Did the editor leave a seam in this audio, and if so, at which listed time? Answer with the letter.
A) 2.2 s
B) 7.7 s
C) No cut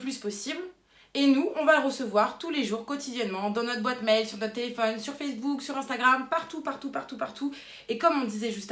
B